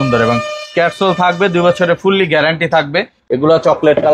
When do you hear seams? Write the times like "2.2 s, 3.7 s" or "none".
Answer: 3.1 s